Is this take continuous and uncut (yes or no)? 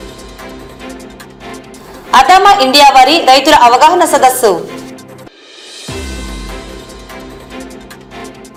yes